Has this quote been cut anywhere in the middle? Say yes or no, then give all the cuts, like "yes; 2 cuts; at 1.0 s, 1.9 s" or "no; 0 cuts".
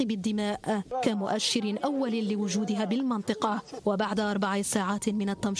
no; 0 cuts